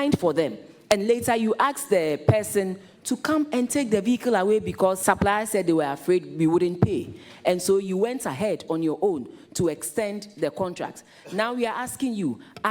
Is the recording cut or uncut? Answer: cut